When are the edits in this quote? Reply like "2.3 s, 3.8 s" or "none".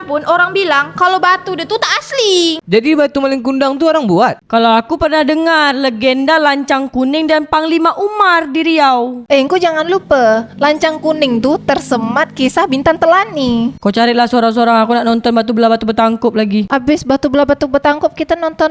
4.4 s, 13.8 s